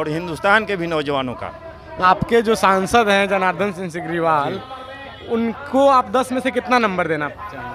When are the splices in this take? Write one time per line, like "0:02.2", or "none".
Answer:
0:02.0